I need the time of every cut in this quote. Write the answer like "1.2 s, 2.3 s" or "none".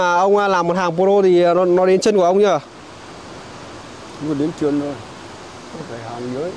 none